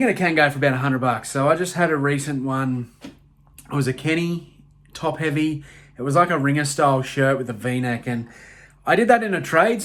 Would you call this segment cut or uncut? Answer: uncut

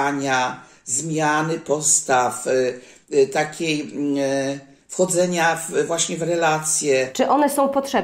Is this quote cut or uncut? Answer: cut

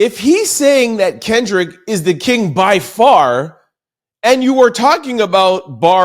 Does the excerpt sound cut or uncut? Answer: uncut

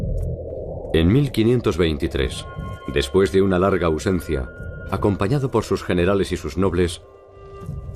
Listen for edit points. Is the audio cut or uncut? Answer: uncut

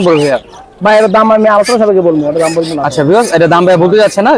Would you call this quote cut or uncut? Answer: uncut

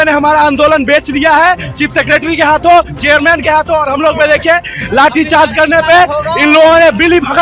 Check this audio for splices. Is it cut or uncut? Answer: uncut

